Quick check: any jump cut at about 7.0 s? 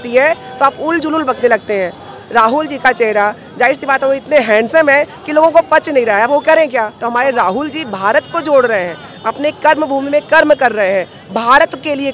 yes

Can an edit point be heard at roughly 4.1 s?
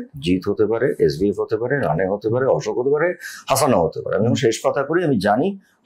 no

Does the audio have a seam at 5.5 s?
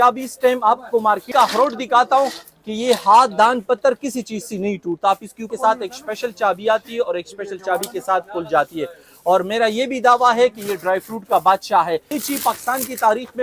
yes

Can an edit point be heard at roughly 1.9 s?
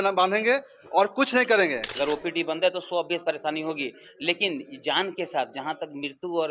yes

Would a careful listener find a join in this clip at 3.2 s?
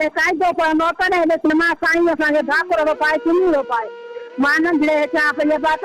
no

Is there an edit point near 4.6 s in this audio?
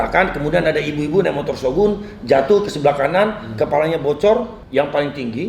yes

